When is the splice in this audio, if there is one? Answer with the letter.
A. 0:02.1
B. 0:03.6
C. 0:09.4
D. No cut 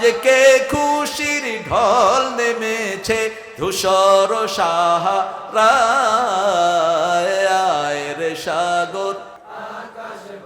C